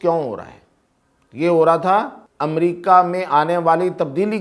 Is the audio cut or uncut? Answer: cut